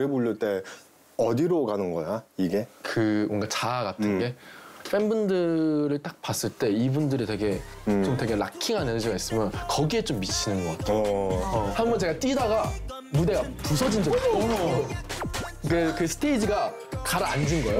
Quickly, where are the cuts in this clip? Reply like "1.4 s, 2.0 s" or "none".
11.7 s